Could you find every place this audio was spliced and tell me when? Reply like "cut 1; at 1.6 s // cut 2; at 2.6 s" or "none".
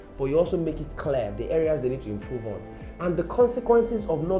none

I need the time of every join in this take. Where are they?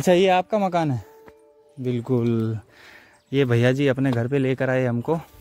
none

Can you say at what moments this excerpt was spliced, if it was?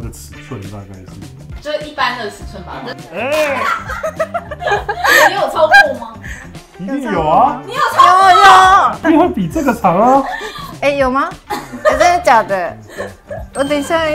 cut 1; at 1.6 s // cut 2; at 9.0 s

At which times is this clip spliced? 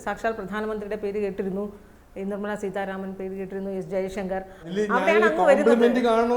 cut 1; at 4.7 s

